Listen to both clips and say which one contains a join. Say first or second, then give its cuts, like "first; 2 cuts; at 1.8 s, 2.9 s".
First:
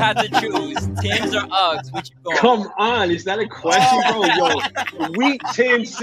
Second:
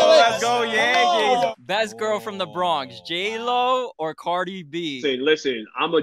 second; 2 cuts; at 1.5 s, 5.0 s